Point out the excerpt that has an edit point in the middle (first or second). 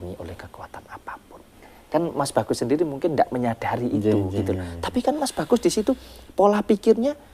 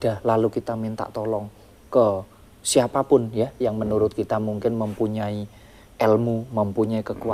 first